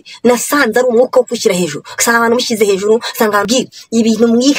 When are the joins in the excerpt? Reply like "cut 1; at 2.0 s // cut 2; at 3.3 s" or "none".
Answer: cut 1; at 3.4 s